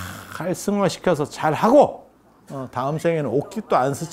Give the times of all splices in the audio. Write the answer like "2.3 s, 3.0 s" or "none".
none

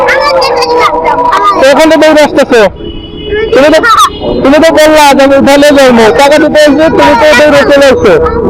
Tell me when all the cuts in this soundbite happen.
none

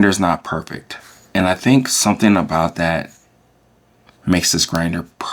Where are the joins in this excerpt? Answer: none

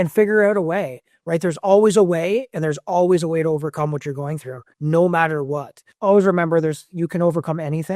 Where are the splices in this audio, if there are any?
5.9 s

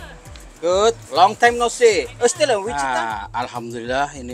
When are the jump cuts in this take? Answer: 2.7 s

